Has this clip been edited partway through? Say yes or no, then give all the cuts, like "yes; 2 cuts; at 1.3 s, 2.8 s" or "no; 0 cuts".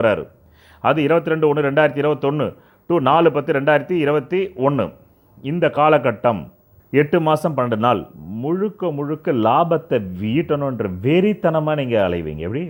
no; 0 cuts